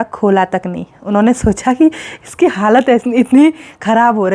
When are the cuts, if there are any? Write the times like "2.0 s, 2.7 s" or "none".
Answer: none